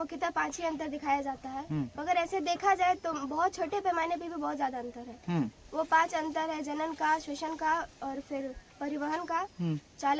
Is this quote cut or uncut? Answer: uncut